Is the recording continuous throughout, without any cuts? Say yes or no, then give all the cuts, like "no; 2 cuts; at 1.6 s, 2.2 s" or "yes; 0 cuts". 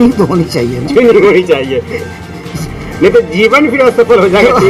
yes; 0 cuts